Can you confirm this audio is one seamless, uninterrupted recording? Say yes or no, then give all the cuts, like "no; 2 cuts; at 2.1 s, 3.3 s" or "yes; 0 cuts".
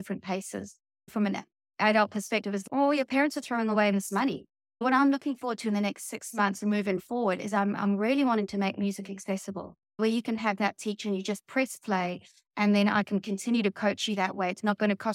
no; 2 cuts; at 1.1 s, 4.8 s